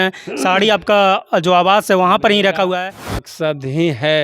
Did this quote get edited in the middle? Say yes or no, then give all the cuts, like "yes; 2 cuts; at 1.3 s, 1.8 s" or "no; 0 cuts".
yes; 1 cut; at 3.3 s